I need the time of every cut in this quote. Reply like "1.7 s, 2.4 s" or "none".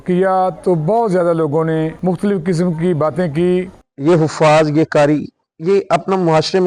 1.9 s, 3.8 s